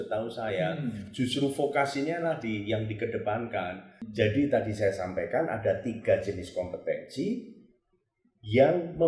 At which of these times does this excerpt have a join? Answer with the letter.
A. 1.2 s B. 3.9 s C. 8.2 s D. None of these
B